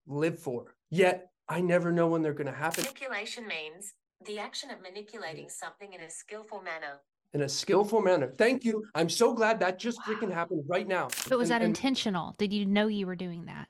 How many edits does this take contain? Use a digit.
2